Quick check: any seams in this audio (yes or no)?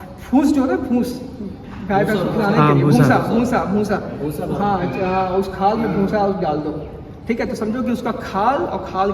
no